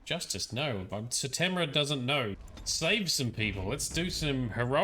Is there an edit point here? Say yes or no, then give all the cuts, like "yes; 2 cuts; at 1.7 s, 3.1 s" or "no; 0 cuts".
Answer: yes; 1 cut; at 2.4 s